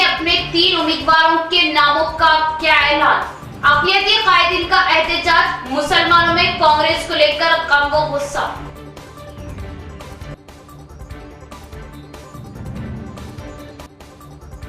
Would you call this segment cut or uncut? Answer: uncut